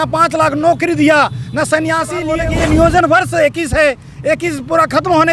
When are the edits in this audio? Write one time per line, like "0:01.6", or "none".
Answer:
0:02.3